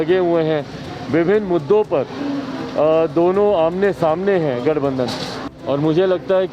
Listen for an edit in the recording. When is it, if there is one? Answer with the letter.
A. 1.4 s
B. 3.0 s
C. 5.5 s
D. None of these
C